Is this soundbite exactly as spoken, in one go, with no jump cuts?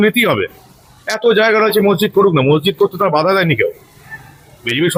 yes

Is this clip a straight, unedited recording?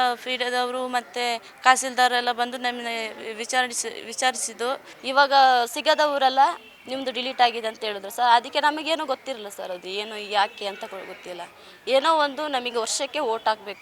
no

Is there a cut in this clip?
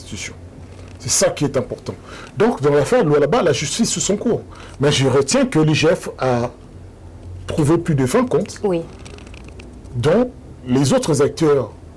no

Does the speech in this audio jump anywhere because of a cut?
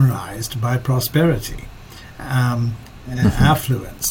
no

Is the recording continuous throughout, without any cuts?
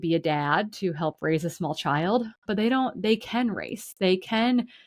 yes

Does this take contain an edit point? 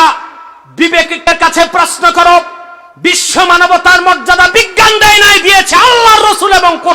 yes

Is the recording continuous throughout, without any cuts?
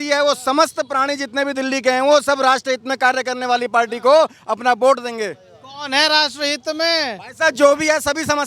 yes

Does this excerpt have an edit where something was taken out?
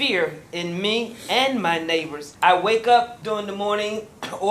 yes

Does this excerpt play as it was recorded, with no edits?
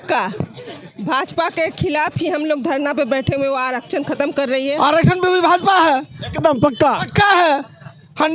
no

